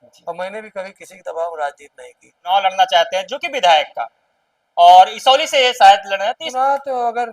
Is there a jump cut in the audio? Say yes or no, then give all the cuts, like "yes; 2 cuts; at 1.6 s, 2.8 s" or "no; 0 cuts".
yes; 2 cuts; at 2.5 s, 6.4 s